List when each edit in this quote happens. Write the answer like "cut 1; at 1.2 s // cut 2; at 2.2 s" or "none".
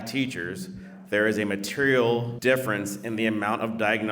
cut 1; at 2.3 s